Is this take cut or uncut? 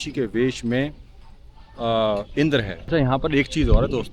cut